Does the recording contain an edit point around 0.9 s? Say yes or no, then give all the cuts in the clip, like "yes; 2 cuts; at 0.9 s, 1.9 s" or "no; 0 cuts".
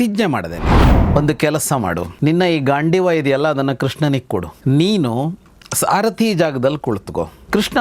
yes; 1 cut; at 0.9 s